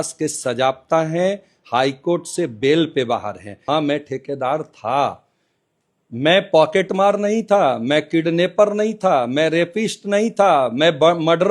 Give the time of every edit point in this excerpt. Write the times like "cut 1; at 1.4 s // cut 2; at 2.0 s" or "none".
cut 1; at 3.6 s